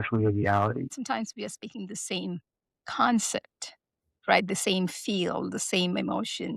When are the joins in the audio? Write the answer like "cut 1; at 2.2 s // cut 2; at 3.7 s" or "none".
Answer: cut 1; at 0.9 s